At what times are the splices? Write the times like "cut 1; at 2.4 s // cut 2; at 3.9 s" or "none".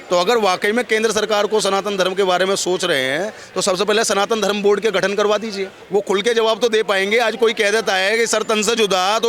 cut 1; at 5.7 s